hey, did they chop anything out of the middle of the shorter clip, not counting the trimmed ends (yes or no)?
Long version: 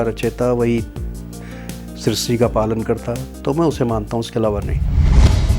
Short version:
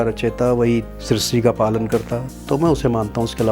yes